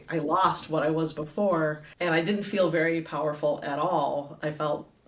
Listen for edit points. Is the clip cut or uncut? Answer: cut